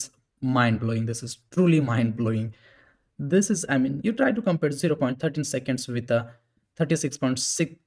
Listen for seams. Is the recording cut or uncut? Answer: uncut